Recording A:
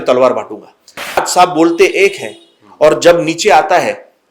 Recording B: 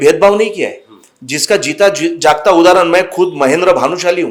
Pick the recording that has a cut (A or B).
A